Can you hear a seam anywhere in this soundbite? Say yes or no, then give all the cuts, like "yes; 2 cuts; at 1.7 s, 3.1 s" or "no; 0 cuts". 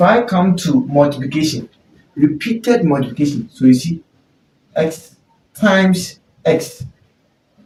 no; 0 cuts